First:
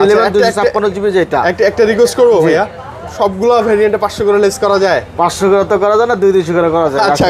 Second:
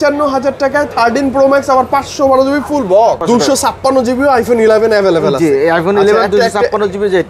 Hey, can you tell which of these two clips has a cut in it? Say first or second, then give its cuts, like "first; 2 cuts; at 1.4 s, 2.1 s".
second; 1 cut; at 3.2 s